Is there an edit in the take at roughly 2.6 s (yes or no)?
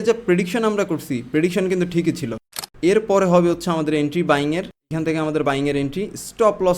yes